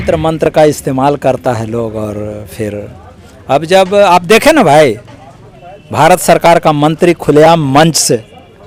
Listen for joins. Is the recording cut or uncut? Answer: uncut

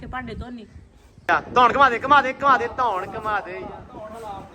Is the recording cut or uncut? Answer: cut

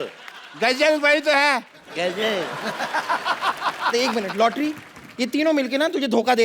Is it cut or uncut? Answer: uncut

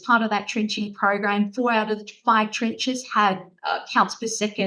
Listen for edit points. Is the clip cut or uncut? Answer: uncut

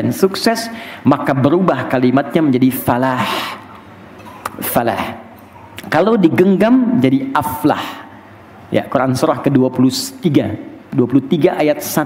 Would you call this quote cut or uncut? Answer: uncut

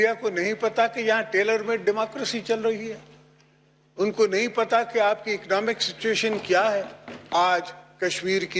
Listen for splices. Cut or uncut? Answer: cut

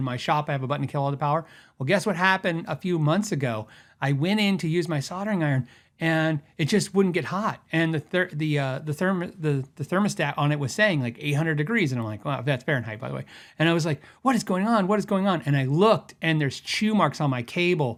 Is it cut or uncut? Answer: uncut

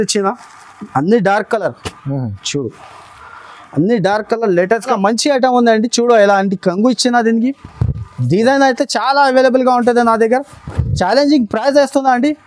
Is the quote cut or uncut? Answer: cut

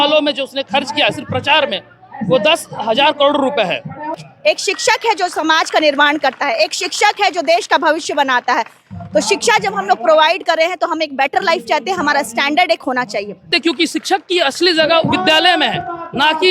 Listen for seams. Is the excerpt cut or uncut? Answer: cut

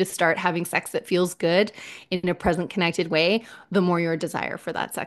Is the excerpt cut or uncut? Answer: uncut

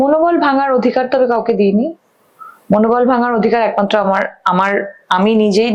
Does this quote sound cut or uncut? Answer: uncut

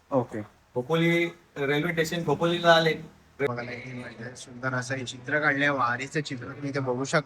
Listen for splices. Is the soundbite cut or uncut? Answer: cut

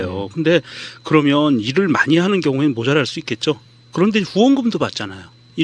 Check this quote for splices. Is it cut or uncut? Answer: cut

